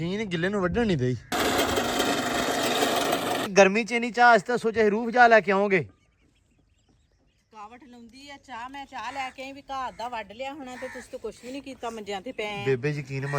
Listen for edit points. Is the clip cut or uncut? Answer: cut